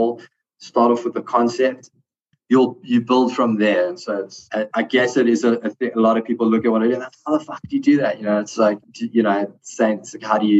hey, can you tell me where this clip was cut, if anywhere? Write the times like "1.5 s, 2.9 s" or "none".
1.9 s, 4.4 s